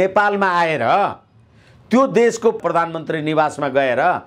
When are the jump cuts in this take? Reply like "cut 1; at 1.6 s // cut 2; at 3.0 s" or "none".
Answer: cut 1; at 2.6 s